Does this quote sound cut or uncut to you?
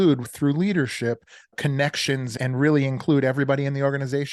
cut